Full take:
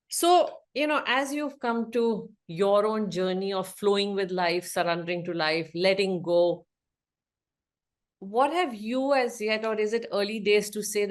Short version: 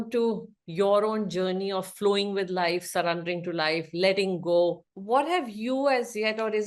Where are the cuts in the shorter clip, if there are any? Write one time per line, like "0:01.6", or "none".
0:04.9